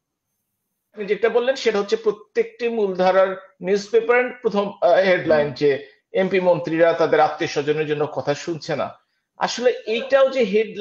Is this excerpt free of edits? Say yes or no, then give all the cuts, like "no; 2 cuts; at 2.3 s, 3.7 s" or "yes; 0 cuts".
no; 1 cut; at 1.0 s